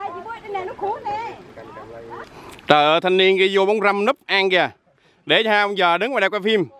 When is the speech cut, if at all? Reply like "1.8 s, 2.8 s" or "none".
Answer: 2.3 s